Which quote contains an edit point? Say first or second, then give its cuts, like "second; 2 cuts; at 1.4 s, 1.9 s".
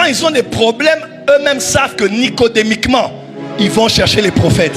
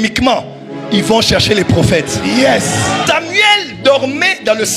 second; 1 cut; at 3.0 s